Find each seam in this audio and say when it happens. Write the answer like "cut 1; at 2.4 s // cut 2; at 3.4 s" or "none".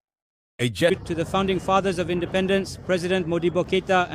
cut 1; at 1.0 s